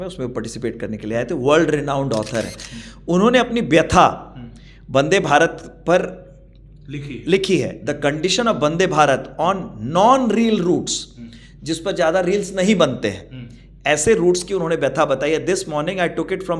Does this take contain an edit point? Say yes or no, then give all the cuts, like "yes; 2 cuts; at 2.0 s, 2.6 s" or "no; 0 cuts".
no; 0 cuts